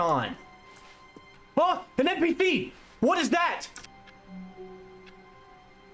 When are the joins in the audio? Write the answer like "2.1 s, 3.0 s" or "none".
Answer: none